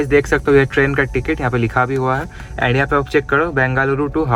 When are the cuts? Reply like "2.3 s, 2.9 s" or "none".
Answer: none